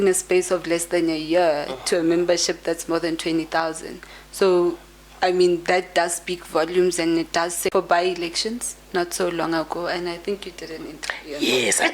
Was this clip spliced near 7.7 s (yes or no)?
yes